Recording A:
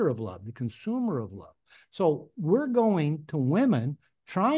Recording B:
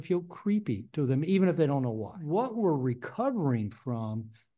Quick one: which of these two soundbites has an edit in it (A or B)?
B